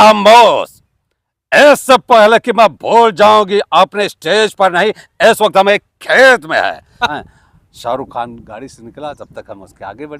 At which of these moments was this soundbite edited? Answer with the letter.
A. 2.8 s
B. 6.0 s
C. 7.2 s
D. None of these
C